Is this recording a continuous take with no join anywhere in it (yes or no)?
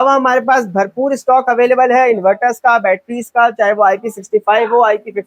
yes